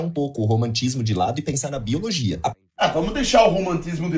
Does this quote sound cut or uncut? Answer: uncut